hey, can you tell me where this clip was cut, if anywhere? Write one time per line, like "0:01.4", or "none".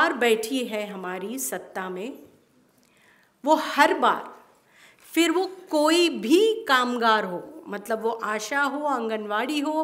none